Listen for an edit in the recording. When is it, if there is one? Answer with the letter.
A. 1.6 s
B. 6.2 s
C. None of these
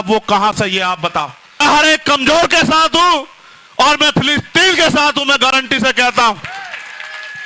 A